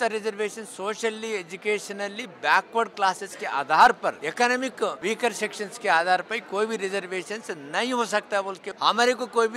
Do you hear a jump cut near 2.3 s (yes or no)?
no